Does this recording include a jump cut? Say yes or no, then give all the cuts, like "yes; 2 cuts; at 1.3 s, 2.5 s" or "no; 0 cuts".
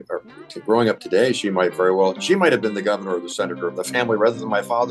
no; 0 cuts